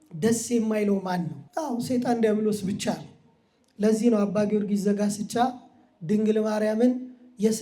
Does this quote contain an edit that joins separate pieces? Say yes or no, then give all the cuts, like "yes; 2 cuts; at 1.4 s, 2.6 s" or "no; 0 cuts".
yes; 1 cut; at 1.4 s